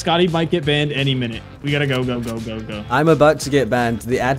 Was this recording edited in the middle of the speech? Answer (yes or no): no